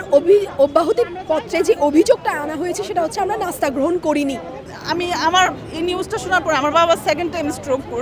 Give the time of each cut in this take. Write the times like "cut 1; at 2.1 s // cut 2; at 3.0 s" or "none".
cut 1; at 4.7 s